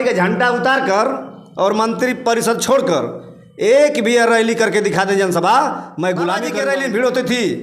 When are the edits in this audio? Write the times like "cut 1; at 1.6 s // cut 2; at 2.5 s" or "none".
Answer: cut 1; at 6.5 s